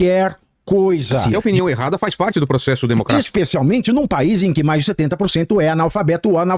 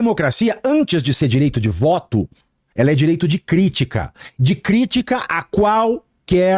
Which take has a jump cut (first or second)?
first